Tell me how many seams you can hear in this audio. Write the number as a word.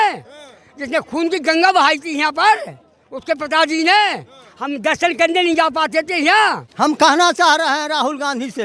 one